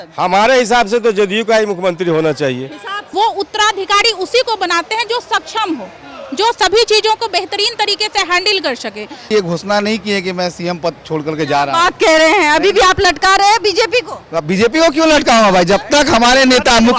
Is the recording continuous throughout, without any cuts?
no; 2 cuts; at 3.0 s, 9.3 s

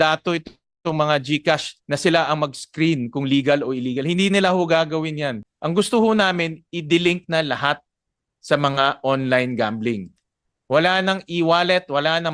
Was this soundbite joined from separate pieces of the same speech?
yes; 1 cut; at 5.4 s

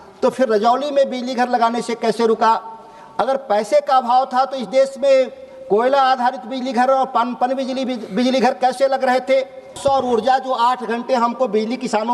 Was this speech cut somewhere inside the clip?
yes; 1 cut; at 9.8 s

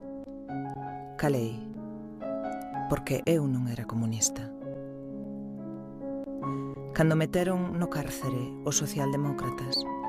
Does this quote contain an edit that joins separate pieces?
no; 0 cuts

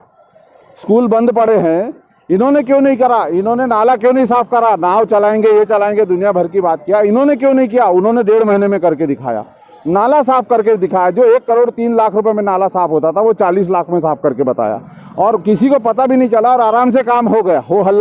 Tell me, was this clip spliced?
no; 0 cuts

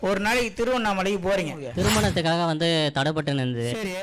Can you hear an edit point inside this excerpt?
yes; 1 cut; at 1.7 s

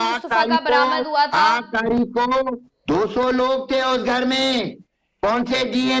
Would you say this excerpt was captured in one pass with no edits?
no; 1 cut; at 2.7 s

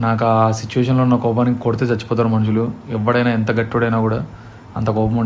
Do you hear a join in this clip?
no; 0 cuts

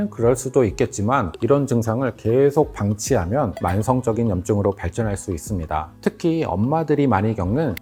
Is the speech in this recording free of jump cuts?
yes; 0 cuts

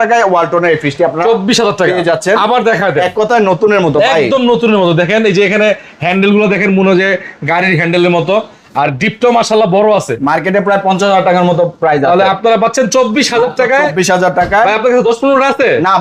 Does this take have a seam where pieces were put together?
no; 0 cuts

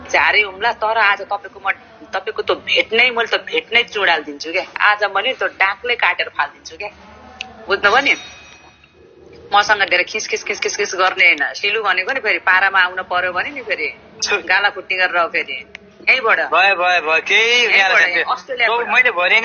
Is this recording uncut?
yes; 0 cuts

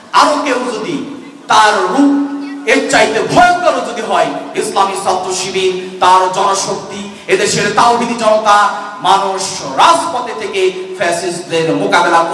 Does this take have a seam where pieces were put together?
no; 0 cuts

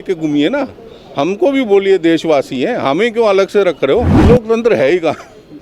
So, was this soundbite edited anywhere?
yes; 1 cut; at 4.1 s

